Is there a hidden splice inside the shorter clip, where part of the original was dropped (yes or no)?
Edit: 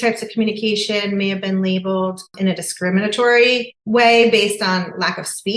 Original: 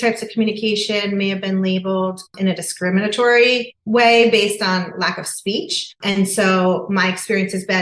no